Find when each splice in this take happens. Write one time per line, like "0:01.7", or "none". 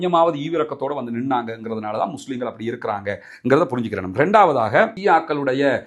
none